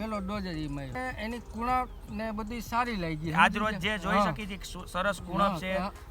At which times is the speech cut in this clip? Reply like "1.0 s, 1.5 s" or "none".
0.9 s